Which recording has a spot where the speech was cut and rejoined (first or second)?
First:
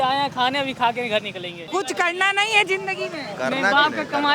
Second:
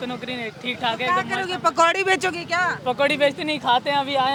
first